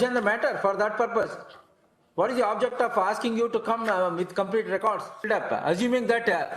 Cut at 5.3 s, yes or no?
yes